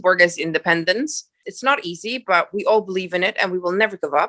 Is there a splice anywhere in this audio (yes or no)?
yes